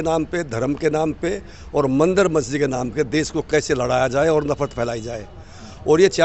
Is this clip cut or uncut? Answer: uncut